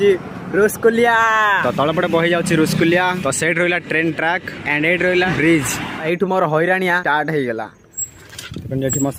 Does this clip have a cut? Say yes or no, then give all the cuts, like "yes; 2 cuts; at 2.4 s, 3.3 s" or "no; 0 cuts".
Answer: no; 0 cuts